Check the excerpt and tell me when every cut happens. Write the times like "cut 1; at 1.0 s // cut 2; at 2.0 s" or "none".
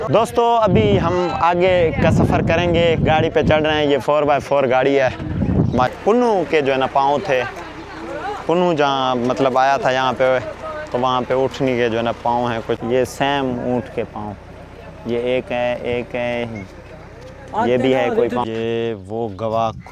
cut 1; at 5.9 s // cut 2; at 12.2 s // cut 3; at 18.2 s